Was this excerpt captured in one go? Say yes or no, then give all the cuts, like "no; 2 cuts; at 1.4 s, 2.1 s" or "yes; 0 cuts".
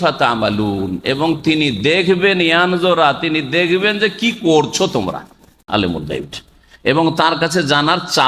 no; 1 cut; at 5.5 s